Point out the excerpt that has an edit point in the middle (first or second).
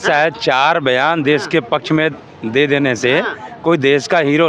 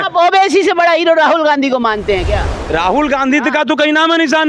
second